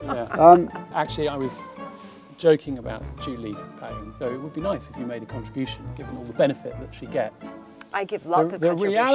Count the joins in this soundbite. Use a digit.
1